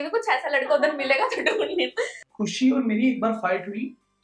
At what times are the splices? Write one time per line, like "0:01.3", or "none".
0:02.2